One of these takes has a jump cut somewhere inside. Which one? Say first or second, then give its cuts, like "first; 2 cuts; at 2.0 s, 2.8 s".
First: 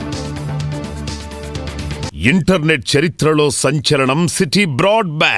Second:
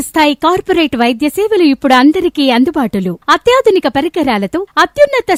first; 1 cut; at 2.1 s